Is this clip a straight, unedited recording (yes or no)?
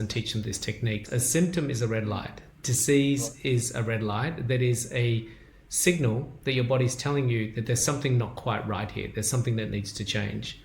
no